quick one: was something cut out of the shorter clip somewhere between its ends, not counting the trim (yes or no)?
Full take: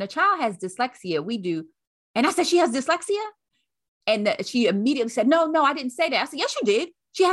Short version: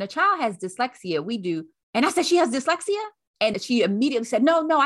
yes